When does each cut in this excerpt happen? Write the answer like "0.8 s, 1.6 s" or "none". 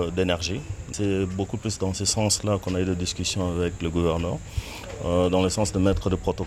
0.9 s